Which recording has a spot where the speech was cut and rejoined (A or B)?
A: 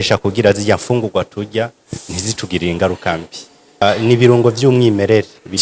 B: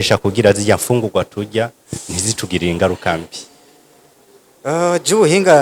A